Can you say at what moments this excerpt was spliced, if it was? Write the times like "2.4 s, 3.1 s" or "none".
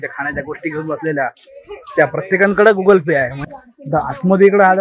3.4 s

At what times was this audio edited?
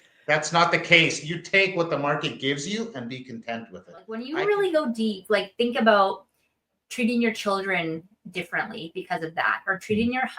4.3 s

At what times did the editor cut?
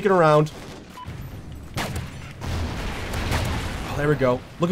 0.9 s

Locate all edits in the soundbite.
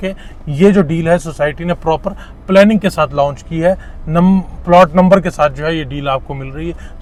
none

